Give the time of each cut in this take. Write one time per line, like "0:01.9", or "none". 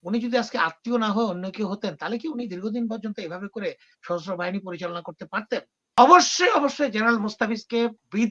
0:06.0